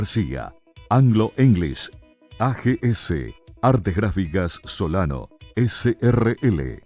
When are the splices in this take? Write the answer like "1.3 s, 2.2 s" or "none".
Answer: none